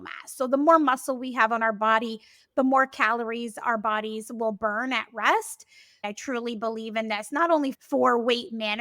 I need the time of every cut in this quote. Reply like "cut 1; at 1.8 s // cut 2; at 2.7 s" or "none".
cut 1; at 6.0 s // cut 2; at 7.7 s

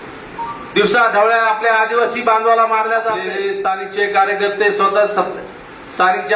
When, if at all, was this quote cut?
cut 1; at 3.3 s

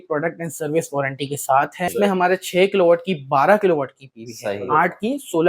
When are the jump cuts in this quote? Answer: cut 1; at 1.9 s

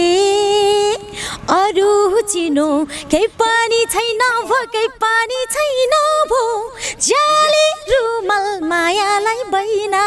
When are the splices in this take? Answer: none

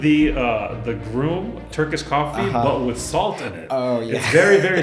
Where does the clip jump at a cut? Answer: cut 1; at 1.7 s

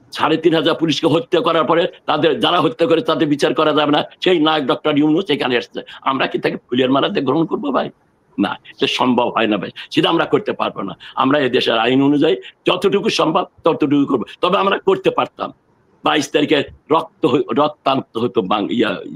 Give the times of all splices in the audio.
none

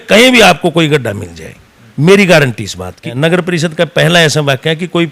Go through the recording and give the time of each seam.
cut 1; at 3.0 s

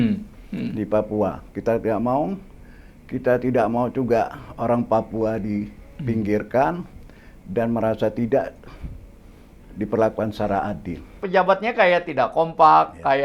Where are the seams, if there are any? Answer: cut 1; at 11.2 s

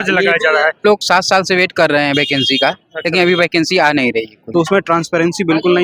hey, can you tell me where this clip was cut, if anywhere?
cut 1; at 0.8 s // cut 2; at 4.4 s

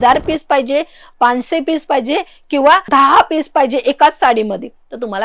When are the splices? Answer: none

